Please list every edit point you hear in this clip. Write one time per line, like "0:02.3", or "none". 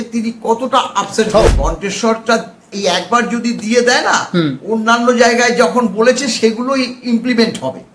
0:01.5
0:02.7

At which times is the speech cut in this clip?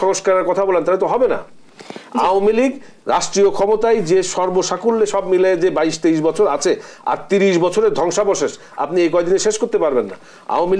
none

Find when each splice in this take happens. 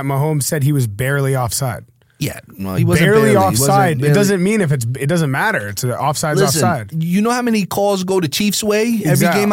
0:06.9

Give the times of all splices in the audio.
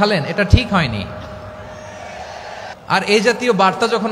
0:02.7

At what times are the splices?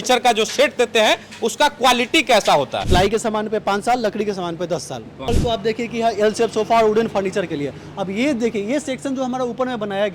0:02.8
0:05.1

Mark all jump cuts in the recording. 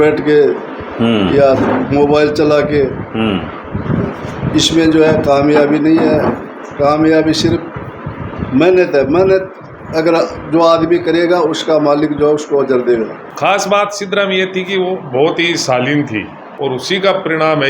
0:13.3
0:16.4

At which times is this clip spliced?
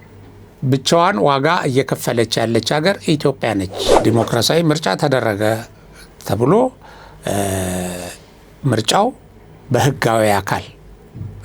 0:04.0

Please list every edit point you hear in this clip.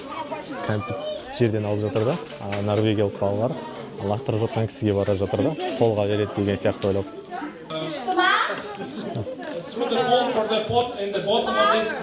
0:07.7

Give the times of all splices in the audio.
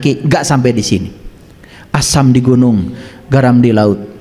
none

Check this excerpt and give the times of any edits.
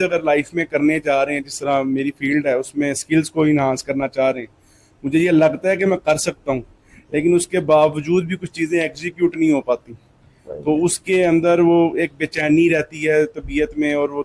none

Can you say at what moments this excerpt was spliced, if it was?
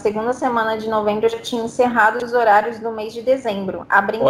none

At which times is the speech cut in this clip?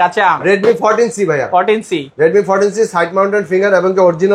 none

